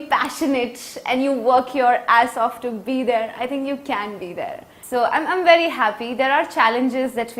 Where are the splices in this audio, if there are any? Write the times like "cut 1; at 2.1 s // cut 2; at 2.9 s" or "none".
cut 1; at 4.7 s

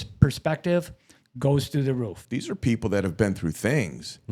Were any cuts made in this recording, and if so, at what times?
cut 1; at 2.2 s

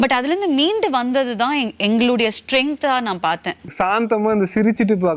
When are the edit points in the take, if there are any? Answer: cut 1; at 3.7 s

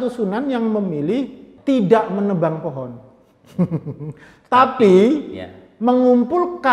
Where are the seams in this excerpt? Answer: cut 1; at 1.4 s

